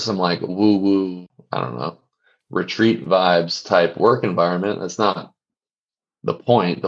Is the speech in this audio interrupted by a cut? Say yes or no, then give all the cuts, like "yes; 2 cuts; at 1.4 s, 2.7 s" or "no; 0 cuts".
yes; 1 cut; at 1.3 s